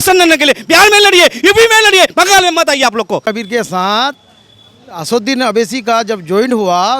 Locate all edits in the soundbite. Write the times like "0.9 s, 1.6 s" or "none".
3.2 s